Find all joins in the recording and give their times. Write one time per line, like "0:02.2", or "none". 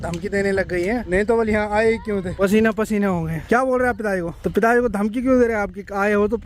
0:01.0
0:02.3
0:03.4
0:04.3